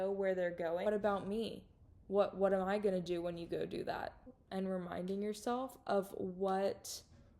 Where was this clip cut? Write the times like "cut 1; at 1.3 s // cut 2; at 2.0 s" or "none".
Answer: cut 1; at 0.9 s // cut 2; at 4.3 s